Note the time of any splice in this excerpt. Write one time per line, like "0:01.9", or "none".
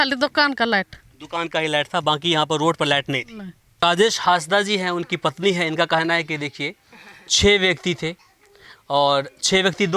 0:03.8